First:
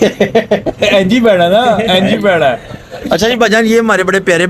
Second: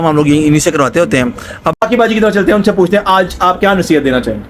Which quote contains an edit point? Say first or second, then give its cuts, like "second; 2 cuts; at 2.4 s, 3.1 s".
second; 1 cut; at 1.8 s